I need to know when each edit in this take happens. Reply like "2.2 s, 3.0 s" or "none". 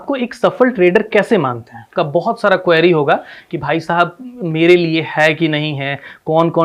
1.9 s